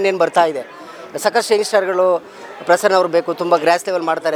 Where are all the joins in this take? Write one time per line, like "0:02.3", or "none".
none